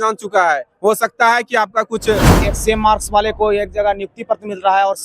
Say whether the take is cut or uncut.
cut